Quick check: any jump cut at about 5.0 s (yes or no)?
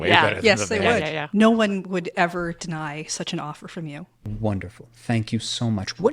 no